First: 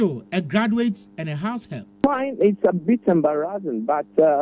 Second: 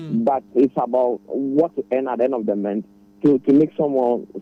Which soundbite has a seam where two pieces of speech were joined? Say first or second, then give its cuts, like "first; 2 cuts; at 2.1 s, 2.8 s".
first; 1 cut; at 2.0 s